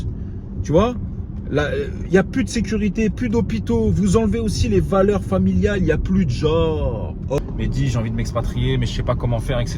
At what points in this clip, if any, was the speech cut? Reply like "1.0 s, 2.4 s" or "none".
7.4 s